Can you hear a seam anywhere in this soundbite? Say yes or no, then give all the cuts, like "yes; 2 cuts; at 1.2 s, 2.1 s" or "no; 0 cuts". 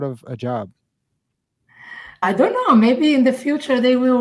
yes; 1 cut; at 2.2 s